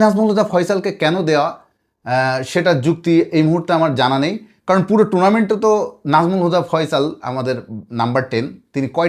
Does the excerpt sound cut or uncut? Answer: uncut